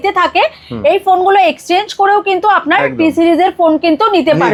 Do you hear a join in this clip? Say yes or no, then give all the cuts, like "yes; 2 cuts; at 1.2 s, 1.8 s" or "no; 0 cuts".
no; 0 cuts